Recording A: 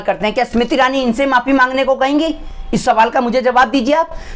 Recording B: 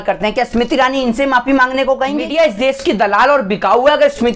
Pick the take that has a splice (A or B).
B